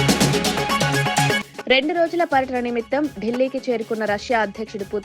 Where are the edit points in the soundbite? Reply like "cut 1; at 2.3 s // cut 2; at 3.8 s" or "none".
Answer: cut 1; at 1.3 s